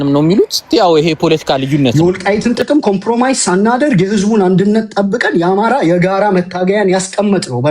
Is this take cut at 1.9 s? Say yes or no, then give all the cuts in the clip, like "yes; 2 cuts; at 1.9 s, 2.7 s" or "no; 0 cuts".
yes; 1 cut; at 1.9 s